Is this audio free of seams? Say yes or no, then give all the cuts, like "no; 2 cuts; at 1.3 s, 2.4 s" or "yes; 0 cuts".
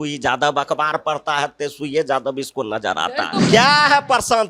no; 1 cut; at 3.4 s